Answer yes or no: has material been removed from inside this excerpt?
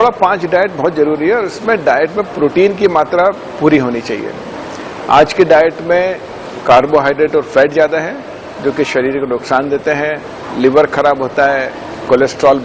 no